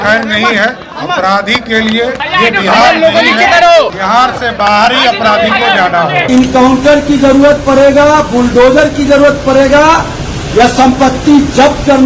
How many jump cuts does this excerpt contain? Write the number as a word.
one